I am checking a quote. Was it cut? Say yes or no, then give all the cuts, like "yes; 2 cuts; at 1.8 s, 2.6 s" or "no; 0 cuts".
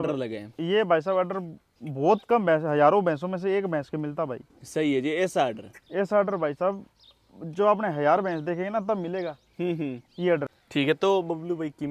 yes; 1 cut; at 10.6 s